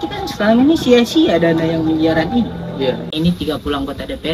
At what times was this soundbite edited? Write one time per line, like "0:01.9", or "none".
0:03.1